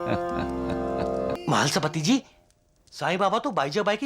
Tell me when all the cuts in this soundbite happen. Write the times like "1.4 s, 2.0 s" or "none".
1.3 s

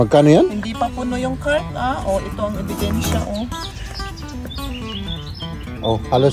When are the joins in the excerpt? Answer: none

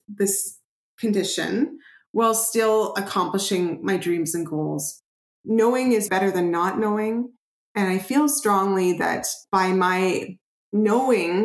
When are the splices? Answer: 4.9 s, 6.1 s, 9.4 s

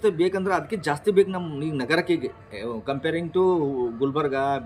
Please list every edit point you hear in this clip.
none

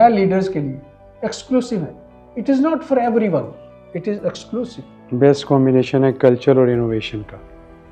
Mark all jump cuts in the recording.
4.9 s

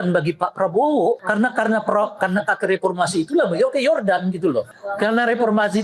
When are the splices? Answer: 1.2 s, 4.7 s

